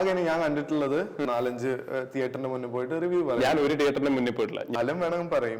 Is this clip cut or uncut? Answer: cut